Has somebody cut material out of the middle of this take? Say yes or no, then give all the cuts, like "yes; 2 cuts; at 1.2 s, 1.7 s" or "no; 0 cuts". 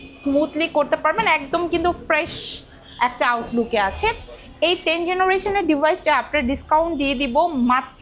no; 0 cuts